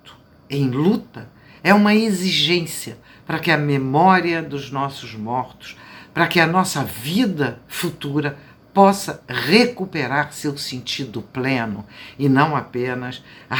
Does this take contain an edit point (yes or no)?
no